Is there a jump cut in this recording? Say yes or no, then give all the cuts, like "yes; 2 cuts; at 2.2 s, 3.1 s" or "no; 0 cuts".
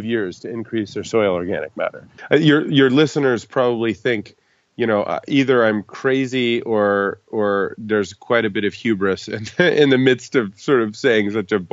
yes; 1 cut; at 2.1 s